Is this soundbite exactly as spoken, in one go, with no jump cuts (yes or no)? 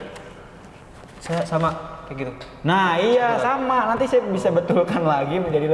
yes